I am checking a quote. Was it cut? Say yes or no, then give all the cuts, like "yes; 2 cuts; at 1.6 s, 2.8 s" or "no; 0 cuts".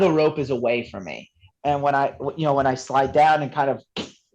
yes; 1 cut; at 1.4 s